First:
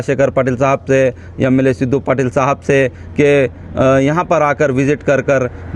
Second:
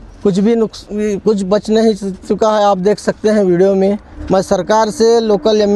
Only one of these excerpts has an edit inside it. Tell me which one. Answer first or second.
second